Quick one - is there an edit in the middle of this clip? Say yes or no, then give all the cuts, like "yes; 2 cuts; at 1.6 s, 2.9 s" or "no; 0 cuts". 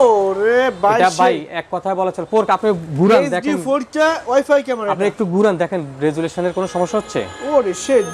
no; 0 cuts